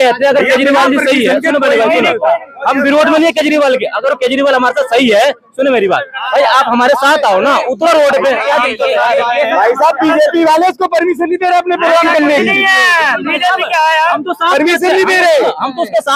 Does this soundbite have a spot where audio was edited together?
no; 0 cuts

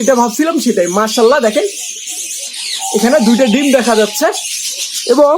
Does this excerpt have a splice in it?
no; 0 cuts

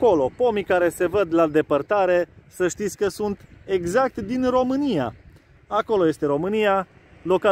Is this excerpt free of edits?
yes; 0 cuts

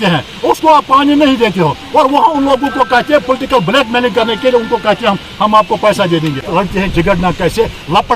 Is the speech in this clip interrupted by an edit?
yes; 1 cut; at 6.5 s

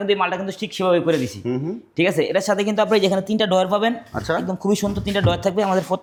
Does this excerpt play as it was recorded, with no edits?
yes; 0 cuts

